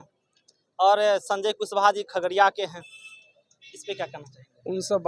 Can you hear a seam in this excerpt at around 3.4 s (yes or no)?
no